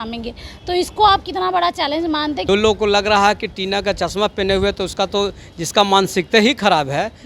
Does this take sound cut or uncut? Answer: cut